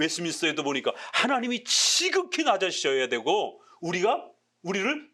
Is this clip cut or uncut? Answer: uncut